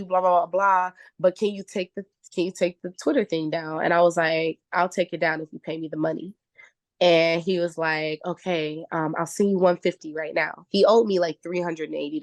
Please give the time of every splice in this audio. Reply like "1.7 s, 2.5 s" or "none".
none